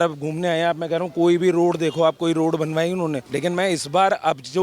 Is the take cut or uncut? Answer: cut